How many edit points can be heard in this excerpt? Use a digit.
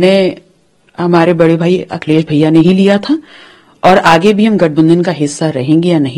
0